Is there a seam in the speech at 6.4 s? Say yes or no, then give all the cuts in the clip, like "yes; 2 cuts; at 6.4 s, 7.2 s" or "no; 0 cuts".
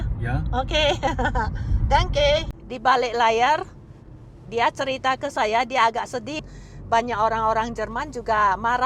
yes; 2 cuts; at 2.6 s, 6.4 s